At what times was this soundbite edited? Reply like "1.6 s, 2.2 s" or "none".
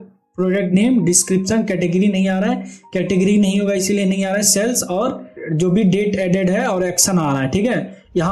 5.4 s